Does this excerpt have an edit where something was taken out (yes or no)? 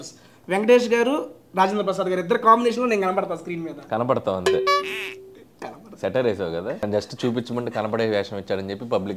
yes